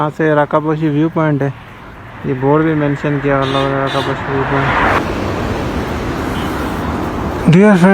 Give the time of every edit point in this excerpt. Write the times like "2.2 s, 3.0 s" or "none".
5.0 s